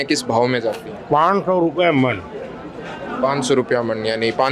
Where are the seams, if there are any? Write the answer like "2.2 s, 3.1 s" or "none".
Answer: none